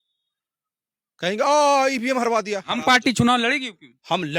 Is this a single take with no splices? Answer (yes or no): no